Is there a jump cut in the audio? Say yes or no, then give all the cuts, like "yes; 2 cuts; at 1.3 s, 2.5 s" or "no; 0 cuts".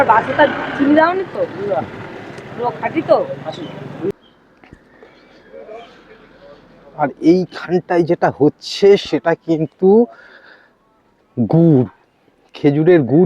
yes; 1 cut; at 4.1 s